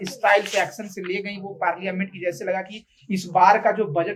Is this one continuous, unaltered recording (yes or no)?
yes